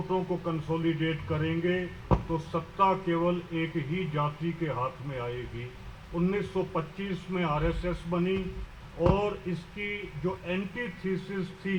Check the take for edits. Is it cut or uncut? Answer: uncut